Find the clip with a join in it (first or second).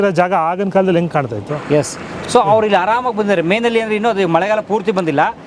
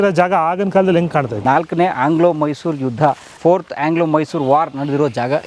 second